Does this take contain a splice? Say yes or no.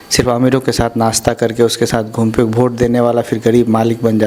no